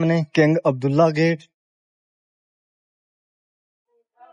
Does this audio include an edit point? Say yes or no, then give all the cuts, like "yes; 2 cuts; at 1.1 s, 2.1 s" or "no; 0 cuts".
no; 0 cuts